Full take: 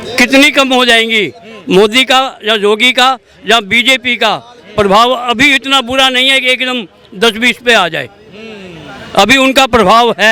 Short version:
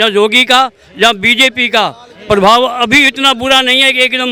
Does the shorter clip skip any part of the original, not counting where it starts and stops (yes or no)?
no